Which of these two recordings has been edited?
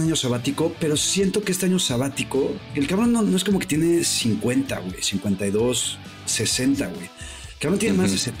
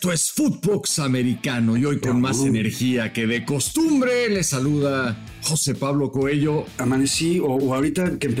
second; 1 cut; at 6.7 s

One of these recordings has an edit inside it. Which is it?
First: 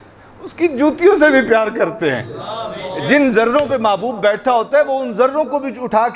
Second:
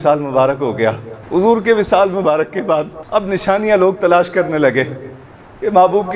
second; 2 cuts; at 1.1 s, 3.0 s

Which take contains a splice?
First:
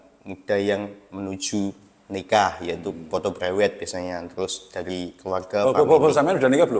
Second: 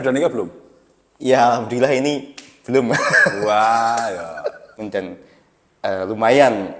second; 1 cut; at 4.7 s

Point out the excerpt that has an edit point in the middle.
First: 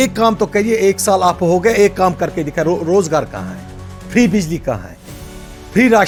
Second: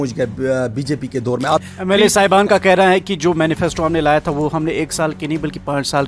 second; 1 cut; at 1.6 s

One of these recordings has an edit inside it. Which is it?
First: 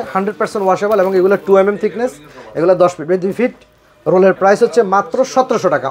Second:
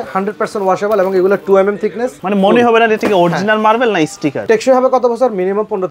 second; 2 cuts; at 2.2 s, 4.4 s

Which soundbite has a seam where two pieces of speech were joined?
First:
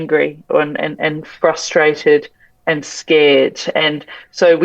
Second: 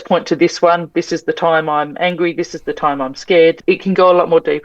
second; 1 cut; at 3.6 s

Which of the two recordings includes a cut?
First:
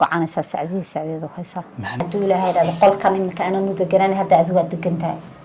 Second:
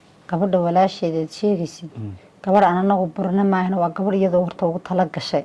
first; 1 cut; at 2.0 s

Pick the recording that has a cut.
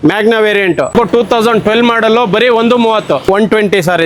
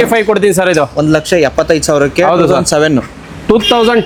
first; 2 cuts; at 0.9 s, 3.3 s

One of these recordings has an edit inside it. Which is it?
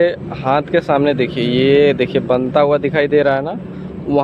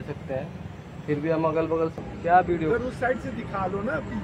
second; 1 cut; at 2.0 s

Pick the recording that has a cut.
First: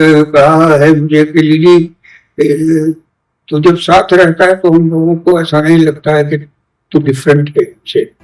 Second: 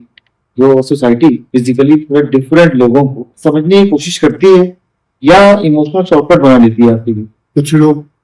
second; 3 cuts; at 1.4 s, 3.3 s, 7.3 s

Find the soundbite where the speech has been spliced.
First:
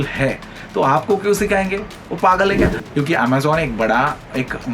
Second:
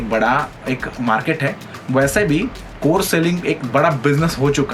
first; 1 cut; at 2.8 s

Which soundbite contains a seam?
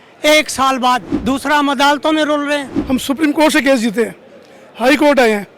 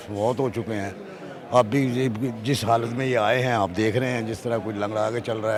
first; 2 cuts; at 1.1 s, 2.7 s

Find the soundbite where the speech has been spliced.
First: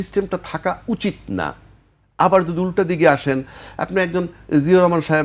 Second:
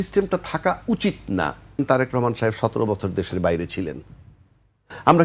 second; 1 cut; at 1.8 s

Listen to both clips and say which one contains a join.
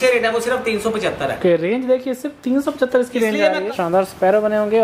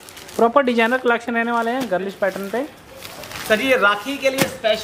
first; 1 cut; at 3.8 s

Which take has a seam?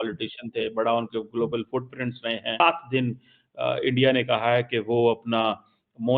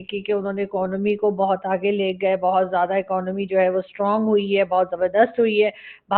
first; 1 cut; at 2.6 s

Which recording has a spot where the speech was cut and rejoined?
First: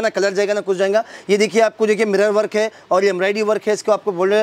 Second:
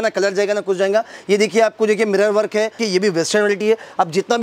second; 1 cut; at 2.8 s

